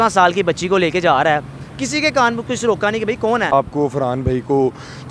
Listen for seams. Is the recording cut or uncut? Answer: cut